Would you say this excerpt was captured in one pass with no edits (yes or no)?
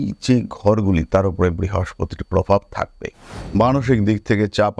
no